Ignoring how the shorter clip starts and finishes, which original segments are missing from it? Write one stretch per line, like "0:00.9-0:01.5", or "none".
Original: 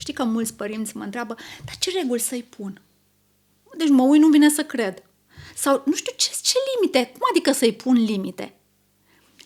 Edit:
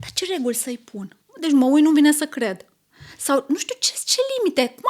0:02.9-0:03.6